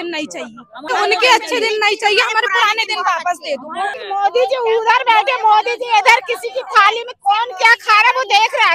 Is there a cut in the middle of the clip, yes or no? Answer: yes